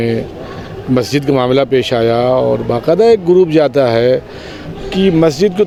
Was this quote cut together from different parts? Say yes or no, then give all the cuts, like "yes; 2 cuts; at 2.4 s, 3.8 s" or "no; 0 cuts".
no; 0 cuts